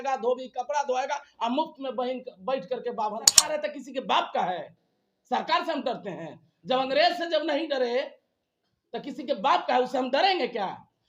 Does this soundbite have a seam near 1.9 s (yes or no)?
no